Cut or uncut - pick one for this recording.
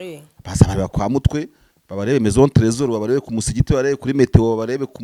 uncut